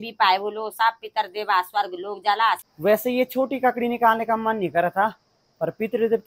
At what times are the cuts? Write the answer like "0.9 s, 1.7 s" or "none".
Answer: 2.7 s